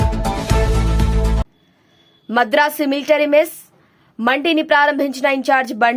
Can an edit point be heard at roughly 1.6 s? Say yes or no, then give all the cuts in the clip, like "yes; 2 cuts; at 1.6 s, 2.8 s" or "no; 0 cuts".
yes; 1 cut; at 1.6 s